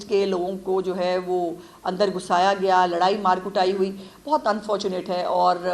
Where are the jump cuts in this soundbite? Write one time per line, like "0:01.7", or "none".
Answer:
none